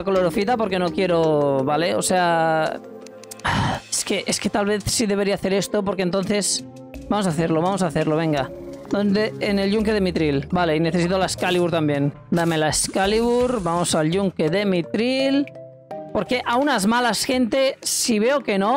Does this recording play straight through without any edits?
yes; 0 cuts

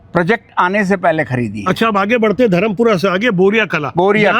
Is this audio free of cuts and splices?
yes; 0 cuts

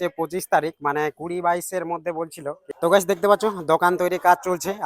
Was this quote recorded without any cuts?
no; 1 cut; at 2.6 s

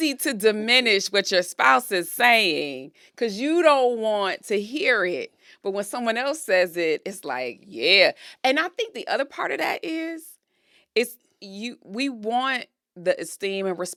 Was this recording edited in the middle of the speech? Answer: no; 0 cuts

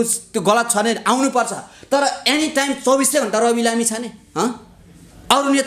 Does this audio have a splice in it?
no; 0 cuts

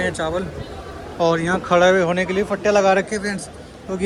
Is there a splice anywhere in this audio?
no; 0 cuts

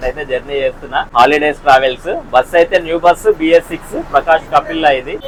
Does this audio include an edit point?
no; 0 cuts

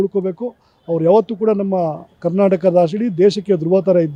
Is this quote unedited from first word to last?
yes; 0 cuts

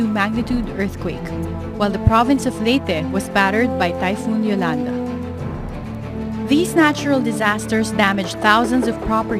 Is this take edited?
no; 0 cuts

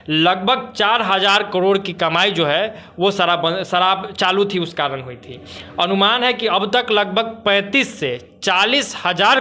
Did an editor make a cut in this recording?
no; 0 cuts

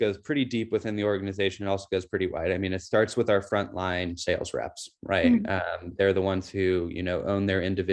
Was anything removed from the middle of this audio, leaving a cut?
no; 0 cuts

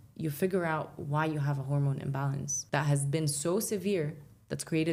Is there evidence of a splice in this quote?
no; 0 cuts

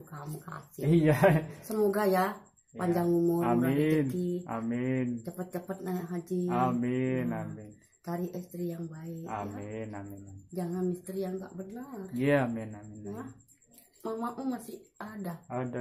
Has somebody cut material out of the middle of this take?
no; 0 cuts

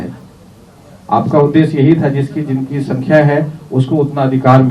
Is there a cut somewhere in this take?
no; 0 cuts

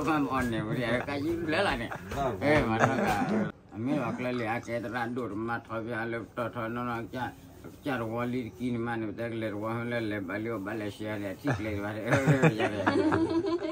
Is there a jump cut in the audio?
yes; 1 cut; at 3.6 s

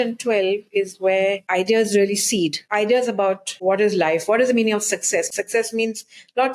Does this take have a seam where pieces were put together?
yes; 4 cuts; at 1.4 s, 2.6 s, 3.5 s, 5.3 s

